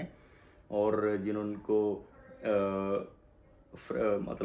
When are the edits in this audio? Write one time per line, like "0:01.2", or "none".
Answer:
none